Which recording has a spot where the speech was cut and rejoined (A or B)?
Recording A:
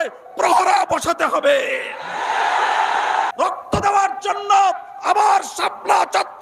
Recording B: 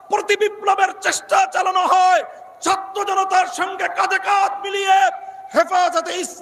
A